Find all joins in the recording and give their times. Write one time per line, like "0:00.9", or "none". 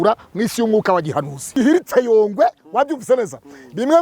0:01.5